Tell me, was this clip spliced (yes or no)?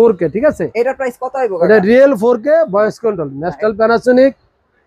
no